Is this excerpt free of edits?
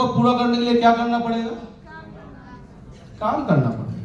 yes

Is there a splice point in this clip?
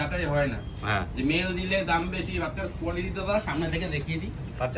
no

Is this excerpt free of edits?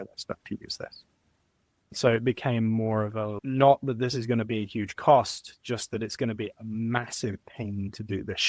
yes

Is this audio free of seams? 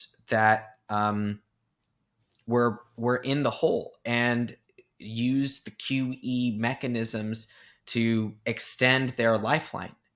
yes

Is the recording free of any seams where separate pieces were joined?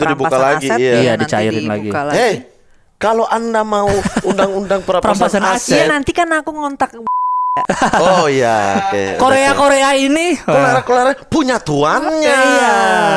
yes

